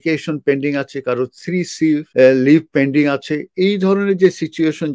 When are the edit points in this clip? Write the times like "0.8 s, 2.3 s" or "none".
2.1 s